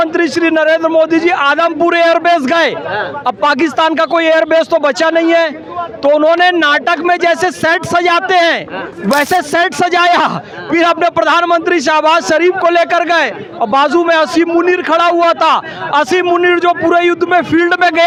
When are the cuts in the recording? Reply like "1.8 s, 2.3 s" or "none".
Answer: none